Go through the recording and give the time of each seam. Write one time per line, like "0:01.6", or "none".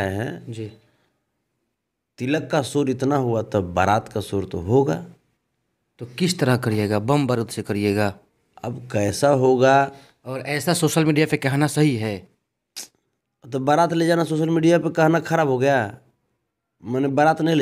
none